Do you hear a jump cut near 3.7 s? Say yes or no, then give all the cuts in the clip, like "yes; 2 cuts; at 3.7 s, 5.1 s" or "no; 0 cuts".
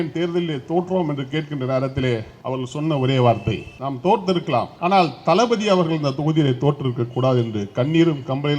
yes; 3 cuts; at 2.3 s, 3.7 s, 4.7 s